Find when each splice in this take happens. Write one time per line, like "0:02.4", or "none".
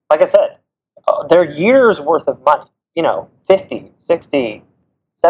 0:02.8
0:04.2